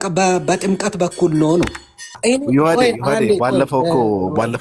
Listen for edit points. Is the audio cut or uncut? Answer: cut